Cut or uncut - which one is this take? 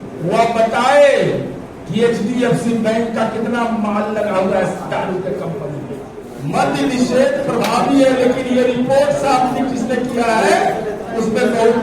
cut